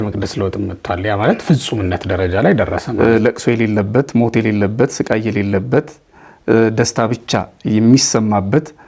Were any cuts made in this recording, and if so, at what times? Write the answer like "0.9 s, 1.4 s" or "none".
2.9 s